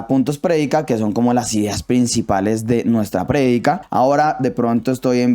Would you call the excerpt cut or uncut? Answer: cut